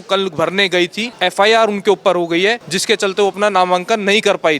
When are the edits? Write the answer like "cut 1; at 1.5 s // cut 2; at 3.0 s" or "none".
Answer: cut 1; at 1.0 s // cut 2; at 2.7 s